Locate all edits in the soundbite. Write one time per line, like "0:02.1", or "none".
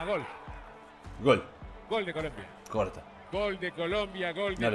none